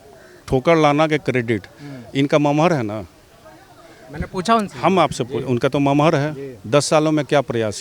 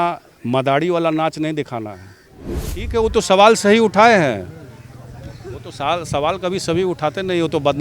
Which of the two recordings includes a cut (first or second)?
second